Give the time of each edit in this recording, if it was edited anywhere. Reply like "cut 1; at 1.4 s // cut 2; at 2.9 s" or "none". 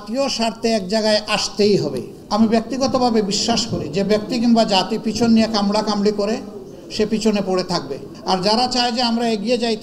cut 1; at 2.1 s // cut 2; at 8.1 s